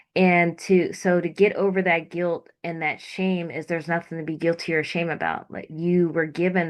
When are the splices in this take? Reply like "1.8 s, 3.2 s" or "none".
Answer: none